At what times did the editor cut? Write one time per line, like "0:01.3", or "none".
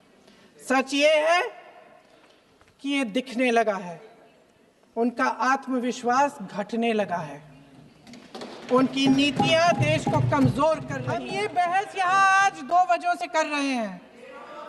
0:11.2